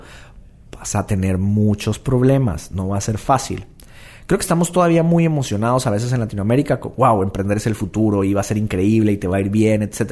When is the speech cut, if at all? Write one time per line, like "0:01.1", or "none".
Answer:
none